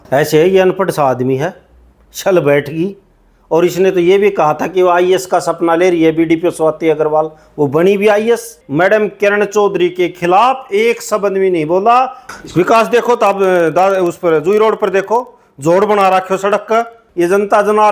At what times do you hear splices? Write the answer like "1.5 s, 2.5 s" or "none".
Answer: 8.6 s, 12.2 s, 17.0 s